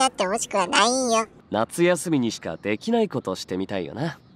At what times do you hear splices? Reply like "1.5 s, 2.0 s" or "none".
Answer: 1.4 s